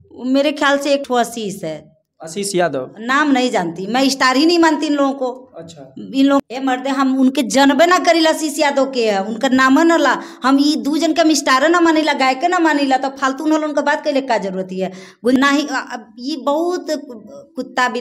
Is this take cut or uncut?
cut